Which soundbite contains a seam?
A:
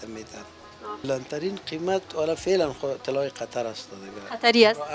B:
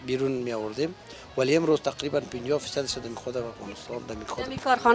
A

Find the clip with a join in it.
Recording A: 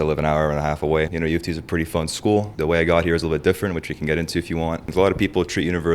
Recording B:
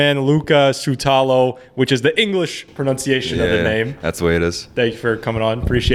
A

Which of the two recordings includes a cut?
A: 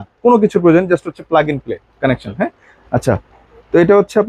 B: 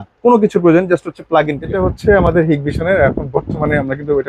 B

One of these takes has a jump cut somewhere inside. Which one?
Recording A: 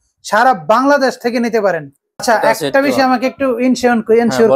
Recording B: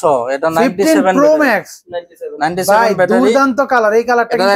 A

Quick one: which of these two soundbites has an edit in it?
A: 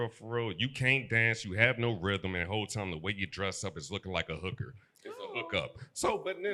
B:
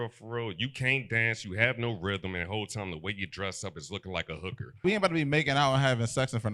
B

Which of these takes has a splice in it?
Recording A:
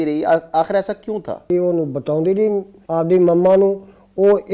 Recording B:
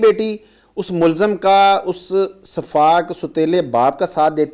A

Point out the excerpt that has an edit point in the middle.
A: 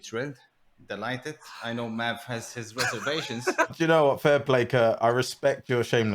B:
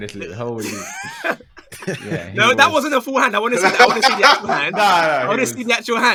A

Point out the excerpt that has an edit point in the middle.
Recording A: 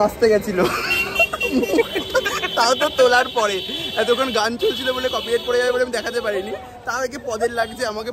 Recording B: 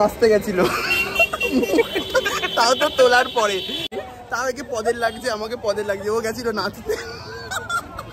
B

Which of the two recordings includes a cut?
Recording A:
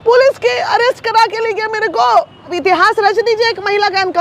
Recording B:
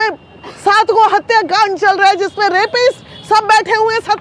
A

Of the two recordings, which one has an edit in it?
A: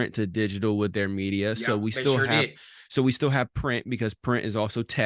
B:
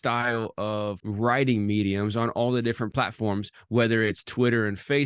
B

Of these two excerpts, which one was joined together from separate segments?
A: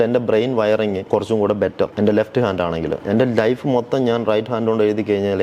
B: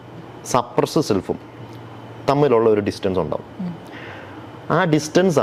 A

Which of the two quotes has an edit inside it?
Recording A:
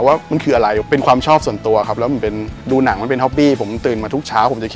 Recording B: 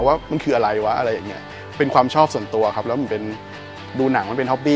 A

